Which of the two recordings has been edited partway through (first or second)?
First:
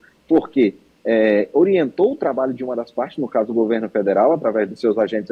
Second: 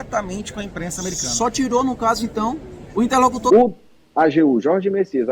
second